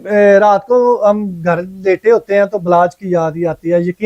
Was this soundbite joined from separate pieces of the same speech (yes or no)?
no